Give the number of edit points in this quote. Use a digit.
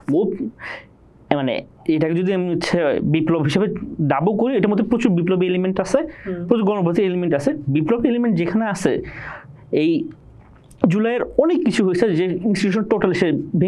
0